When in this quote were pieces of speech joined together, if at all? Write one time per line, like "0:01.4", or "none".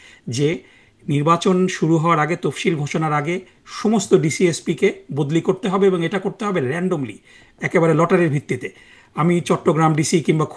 none

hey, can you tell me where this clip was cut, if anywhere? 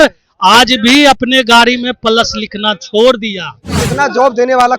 0:03.8

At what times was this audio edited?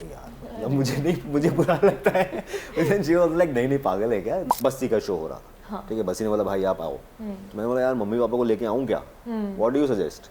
0:04.4

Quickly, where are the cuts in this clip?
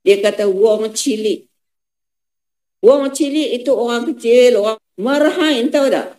0:04.8

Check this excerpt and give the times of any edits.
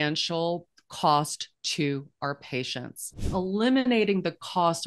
0:03.3

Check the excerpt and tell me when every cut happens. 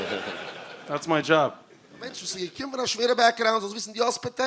0:02.2

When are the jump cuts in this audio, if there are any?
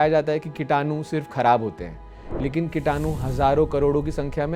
none

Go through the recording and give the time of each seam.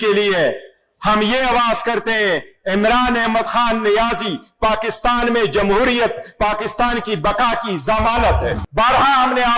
0:08.6

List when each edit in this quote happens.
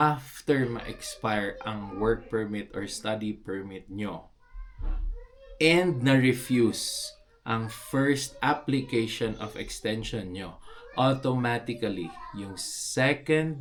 none

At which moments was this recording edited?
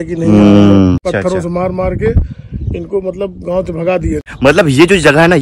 0:01.0
0:04.2

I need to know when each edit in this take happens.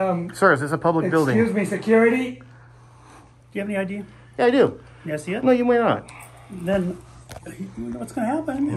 0:03.2
0:05.8

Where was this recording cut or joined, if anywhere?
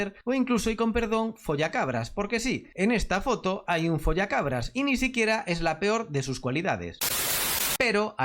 0:07.2

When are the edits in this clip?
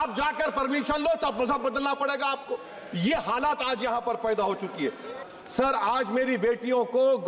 0:05.1

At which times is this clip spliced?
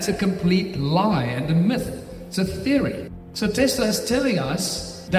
0:03.1

